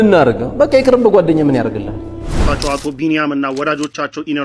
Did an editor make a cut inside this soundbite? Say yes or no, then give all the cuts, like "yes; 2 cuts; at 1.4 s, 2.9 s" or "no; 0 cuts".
yes; 1 cut; at 2.4 s